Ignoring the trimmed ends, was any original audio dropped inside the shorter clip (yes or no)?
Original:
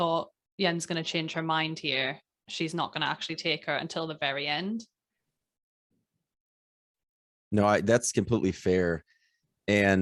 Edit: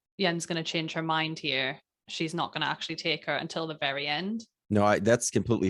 yes